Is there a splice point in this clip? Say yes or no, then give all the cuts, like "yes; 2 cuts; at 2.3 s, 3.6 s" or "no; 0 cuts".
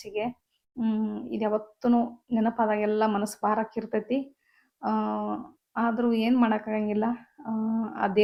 no; 0 cuts